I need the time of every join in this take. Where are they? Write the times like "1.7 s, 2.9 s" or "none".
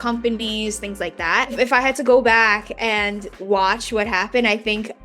1.5 s, 3.4 s